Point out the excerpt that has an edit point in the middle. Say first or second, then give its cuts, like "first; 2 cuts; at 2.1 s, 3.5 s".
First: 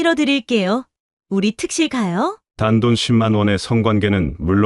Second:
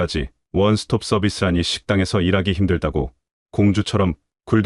first; 1 cut; at 2.4 s